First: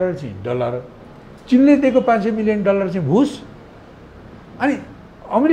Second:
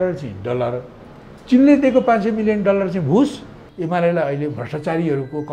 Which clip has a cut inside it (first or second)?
second